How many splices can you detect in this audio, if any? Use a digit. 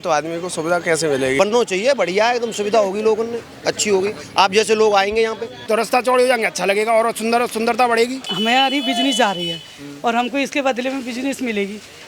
3